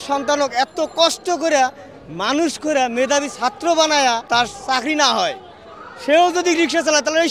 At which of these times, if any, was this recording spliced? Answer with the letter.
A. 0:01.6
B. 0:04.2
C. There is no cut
B